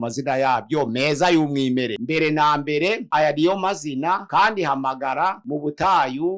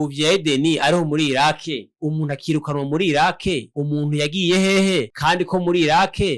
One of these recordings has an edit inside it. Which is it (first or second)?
first